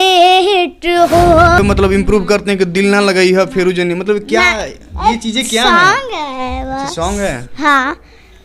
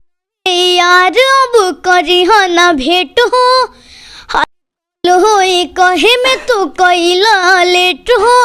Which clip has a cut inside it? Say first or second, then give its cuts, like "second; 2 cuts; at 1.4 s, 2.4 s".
first; 1 cut; at 1.6 s